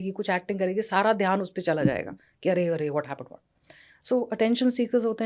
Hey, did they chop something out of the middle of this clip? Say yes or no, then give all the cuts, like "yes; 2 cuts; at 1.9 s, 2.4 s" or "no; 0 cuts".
no; 0 cuts